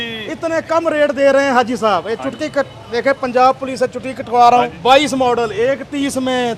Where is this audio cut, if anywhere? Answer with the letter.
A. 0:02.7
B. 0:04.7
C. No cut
B